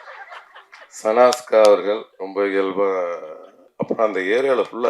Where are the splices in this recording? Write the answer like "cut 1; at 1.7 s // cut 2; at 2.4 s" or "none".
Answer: cut 1; at 3.7 s